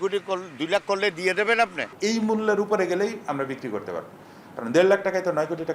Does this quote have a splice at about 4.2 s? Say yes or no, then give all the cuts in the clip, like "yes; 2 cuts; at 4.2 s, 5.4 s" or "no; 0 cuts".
no; 1 cut; at 1.9 s